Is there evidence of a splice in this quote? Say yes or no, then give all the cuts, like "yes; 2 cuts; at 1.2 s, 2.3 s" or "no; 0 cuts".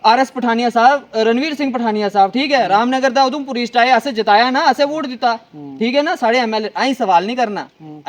no; 0 cuts